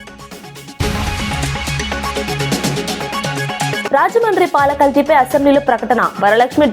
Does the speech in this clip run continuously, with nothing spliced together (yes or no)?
no